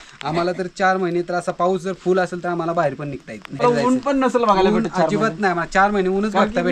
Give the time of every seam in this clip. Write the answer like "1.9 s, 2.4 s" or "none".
3.6 s